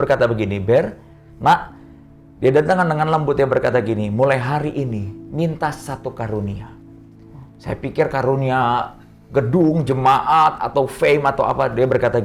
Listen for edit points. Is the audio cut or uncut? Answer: uncut